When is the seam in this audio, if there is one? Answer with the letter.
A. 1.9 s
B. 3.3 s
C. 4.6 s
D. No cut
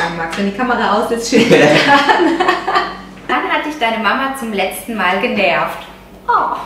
B